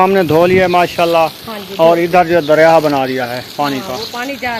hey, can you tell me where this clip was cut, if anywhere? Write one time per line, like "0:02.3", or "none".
none